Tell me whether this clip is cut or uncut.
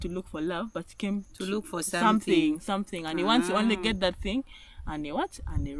uncut